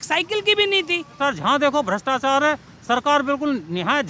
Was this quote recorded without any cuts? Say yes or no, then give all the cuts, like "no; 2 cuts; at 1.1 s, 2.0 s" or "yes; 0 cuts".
no; 1 cut; at 1.1 s